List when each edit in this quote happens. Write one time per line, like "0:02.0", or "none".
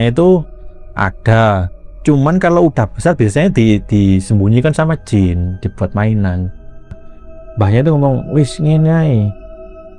0:07.1

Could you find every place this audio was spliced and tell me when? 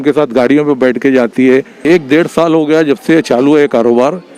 0:01.7

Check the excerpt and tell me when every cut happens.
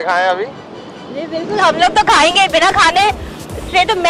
none

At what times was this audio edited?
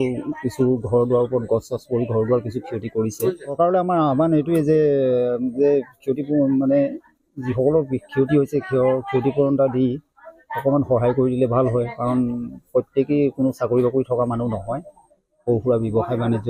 none

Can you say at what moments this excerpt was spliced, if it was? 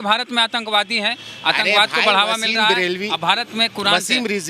none

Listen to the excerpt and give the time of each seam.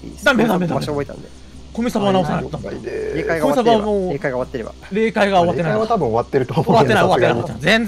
none

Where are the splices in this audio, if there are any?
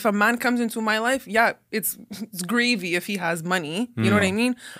none

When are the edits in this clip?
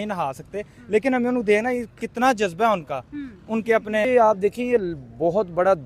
0:04.0

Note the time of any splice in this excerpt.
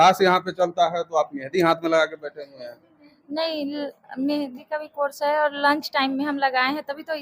none

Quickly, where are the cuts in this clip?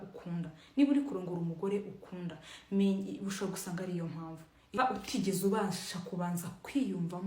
0:04.8

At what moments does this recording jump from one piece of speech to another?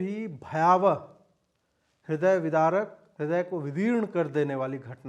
0:03.0

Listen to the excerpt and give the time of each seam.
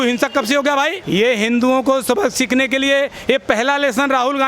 0:01.0

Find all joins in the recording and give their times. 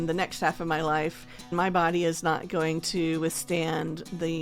0:01.5

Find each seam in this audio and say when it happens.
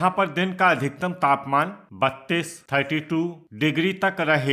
none

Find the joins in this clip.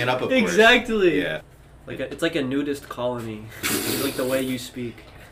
0:01.4

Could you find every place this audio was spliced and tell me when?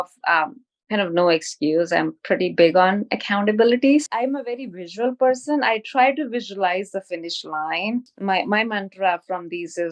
0:04.0
0:08.1

